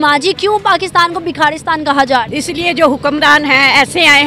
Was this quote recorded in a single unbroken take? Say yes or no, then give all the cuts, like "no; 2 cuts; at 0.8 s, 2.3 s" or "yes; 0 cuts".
no; 1 cut; at 2.3 s